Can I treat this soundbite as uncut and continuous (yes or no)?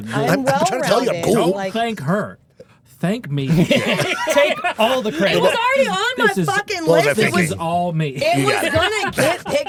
yes